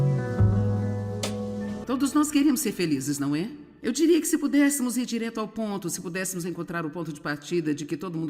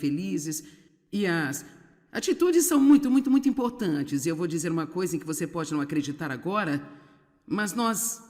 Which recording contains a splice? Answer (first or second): first